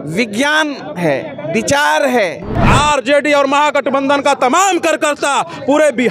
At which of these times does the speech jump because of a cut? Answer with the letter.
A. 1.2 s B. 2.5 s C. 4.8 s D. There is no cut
B